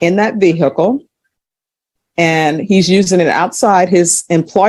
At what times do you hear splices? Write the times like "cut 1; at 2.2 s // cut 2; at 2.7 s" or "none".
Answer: none